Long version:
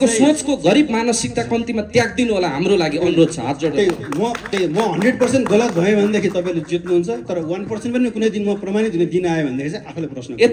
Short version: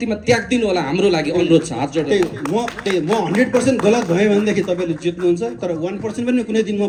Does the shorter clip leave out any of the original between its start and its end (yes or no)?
no